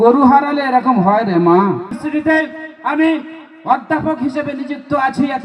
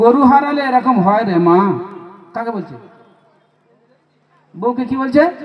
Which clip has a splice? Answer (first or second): first